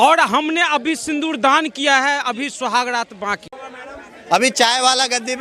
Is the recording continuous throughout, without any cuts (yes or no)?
no